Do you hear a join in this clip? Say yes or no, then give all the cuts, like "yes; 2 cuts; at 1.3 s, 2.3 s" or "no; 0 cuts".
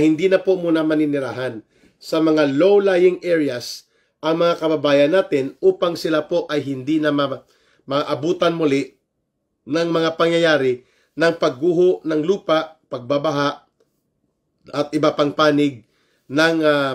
no; 0 cuts